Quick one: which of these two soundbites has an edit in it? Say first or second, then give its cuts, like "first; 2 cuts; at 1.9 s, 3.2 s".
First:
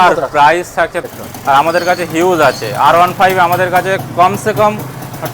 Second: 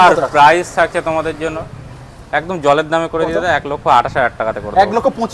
first; 1 cut; at 1.1 s